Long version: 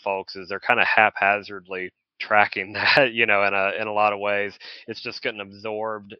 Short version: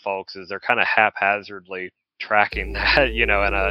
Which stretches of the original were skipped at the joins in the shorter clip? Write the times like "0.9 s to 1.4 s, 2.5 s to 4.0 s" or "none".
none